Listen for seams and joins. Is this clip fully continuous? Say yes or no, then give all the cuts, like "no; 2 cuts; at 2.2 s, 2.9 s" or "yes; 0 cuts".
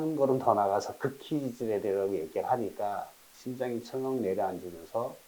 yes; 0 cuts